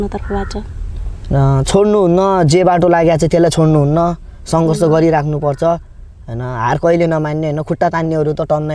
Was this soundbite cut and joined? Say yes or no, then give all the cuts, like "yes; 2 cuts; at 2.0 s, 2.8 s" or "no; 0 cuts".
no; 0 cuts